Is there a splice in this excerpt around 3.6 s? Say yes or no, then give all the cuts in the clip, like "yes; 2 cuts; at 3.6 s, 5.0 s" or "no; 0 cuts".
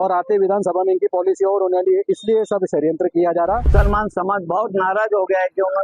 yes; 1 cut; at 3.6 s